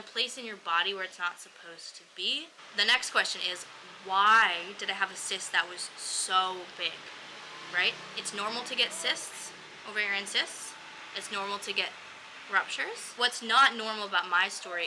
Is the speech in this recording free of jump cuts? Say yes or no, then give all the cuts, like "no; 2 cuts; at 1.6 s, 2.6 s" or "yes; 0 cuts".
no; 2 cuts; at 2.6 s, 13.2 s